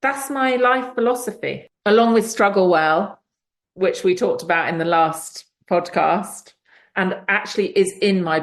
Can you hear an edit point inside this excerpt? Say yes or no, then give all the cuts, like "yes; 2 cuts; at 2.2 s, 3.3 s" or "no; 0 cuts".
yes; 1 cut; at 1.7 s